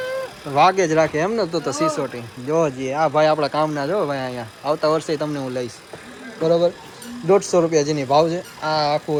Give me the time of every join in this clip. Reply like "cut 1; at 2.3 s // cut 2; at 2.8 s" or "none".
none